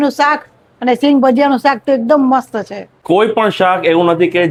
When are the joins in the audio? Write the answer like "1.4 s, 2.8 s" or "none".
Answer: none